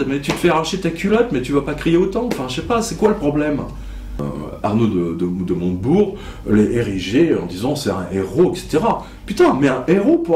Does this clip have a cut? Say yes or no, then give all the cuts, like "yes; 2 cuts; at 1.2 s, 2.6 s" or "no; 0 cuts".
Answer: yes; 1 cut; at 4.2 s